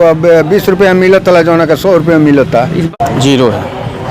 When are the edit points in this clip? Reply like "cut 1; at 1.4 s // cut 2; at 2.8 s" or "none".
cut 1; at 2.9 s